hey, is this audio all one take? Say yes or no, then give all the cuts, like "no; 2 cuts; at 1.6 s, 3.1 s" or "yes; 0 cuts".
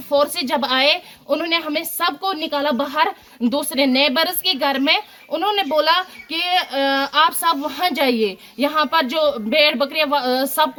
yes; 0 cuts